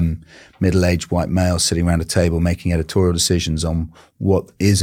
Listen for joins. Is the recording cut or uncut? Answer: uncut